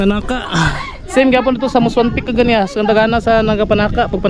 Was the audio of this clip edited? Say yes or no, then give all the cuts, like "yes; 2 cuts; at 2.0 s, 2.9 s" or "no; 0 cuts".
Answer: no; 0 cuts